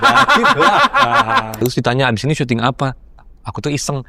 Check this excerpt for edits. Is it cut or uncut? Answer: cut